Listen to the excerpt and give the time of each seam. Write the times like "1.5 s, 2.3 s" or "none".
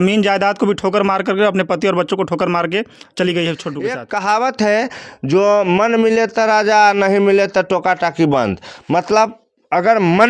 4.0 s